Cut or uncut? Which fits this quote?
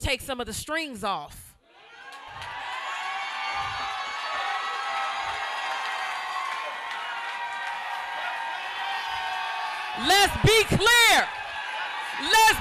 uncut